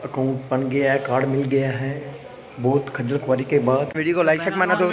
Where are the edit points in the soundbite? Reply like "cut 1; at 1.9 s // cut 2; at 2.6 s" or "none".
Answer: cut 1; at 4.0 s